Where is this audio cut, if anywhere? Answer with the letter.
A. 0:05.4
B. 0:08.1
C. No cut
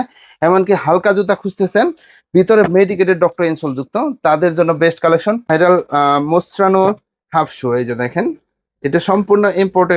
A